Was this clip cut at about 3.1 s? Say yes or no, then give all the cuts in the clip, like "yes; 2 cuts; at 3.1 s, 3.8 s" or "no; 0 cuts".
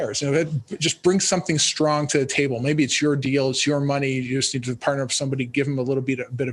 no; 0 cuts